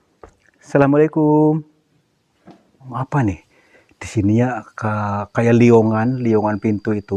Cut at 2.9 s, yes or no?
yes